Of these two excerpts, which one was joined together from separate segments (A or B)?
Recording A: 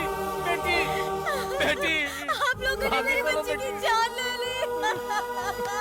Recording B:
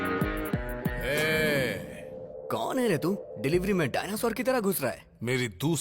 B